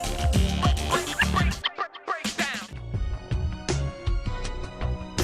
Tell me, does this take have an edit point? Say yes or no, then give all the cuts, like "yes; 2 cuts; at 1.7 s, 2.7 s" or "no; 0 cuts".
yes; 1 cut; at 2.8 s